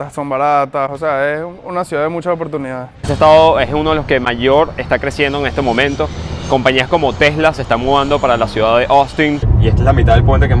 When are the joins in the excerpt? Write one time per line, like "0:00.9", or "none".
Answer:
0:03.0
0:09.5